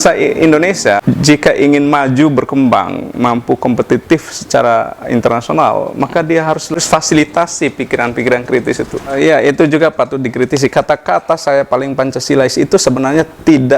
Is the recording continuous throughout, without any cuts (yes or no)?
no